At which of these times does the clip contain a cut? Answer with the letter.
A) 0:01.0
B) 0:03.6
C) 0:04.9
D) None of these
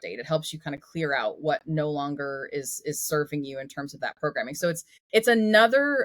C